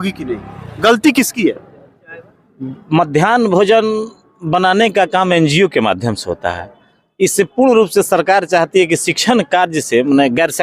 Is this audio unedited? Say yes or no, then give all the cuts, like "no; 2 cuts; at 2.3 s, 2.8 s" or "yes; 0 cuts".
yes; 0 cuts